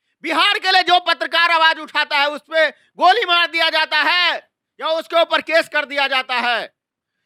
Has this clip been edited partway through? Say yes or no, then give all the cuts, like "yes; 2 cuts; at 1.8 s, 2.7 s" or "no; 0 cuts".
no; 0 cuts